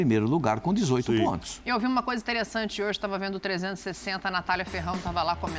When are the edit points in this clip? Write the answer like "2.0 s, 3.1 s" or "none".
none